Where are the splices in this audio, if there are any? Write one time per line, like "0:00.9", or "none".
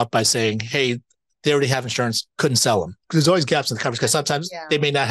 0:02.2
0:03.0

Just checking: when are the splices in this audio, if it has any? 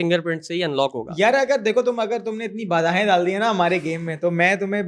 none

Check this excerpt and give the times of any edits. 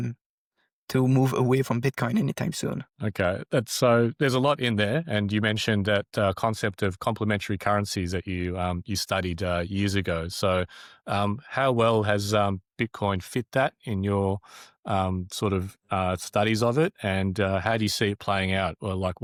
none

